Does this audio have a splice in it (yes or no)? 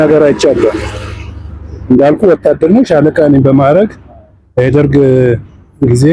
no